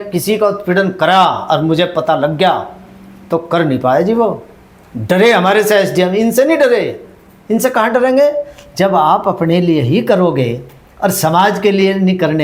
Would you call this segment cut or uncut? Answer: uncut